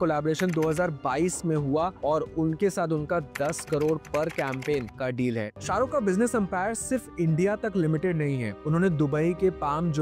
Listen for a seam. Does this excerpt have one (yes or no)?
yes